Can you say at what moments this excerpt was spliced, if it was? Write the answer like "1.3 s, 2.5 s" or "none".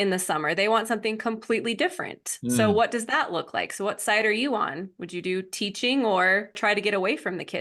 6.6 s